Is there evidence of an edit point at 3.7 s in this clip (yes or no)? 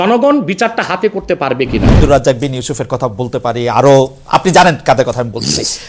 no